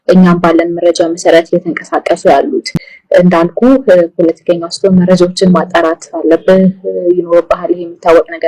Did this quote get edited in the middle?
no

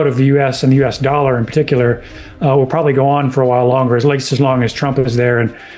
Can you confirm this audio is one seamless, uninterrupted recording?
yes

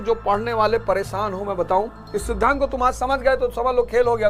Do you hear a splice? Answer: no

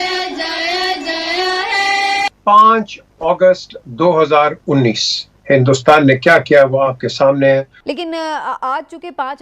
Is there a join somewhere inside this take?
yes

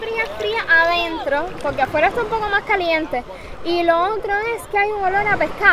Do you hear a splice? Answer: no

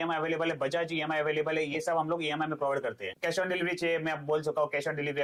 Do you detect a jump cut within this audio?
no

